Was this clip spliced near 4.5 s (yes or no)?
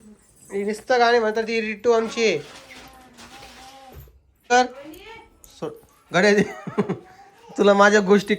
yes